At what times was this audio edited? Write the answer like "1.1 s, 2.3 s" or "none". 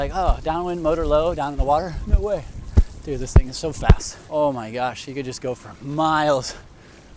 4.1 s